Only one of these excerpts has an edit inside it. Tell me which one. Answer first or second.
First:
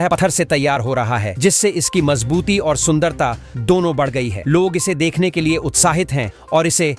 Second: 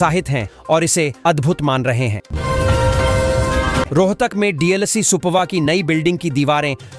second